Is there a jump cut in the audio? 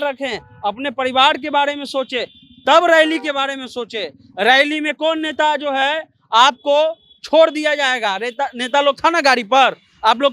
no; 0 cuts

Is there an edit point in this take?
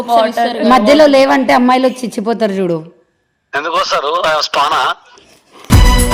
no; 0 cuts

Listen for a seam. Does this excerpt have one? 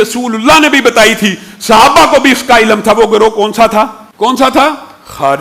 yes; 1 cut; at 4.0 s

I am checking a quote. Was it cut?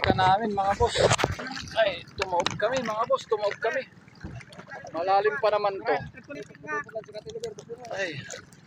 yes; 2 cuts; at 1.4 s, 6.3 s

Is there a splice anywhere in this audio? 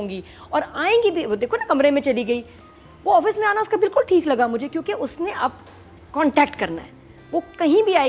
no; 0 cuts

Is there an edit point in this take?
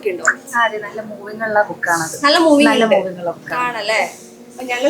no; 0 cuts

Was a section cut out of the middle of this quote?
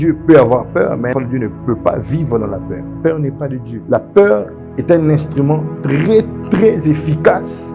yes; 3 cuts; at 1.1 s, 2.8 s, 3.7 s

